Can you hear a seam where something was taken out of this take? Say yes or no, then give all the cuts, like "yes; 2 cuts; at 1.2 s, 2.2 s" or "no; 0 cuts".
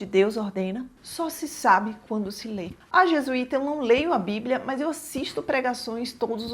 no; 0 cuts